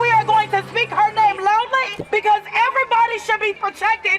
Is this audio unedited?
yes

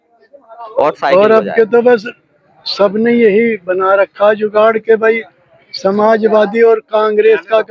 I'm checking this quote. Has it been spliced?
yes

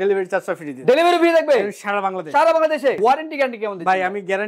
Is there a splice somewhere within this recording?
yes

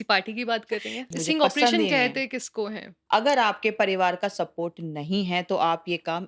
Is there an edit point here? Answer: yes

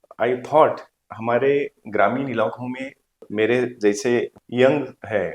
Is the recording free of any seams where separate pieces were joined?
no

